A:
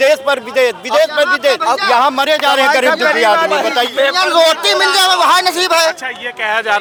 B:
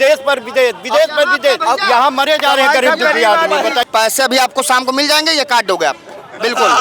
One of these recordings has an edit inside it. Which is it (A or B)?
B